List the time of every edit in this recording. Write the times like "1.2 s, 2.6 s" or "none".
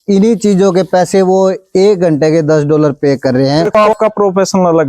3.8 s